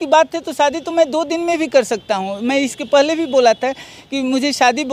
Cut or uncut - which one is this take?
uncut